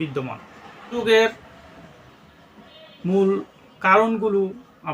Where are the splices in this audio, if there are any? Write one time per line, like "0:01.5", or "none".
0:00.9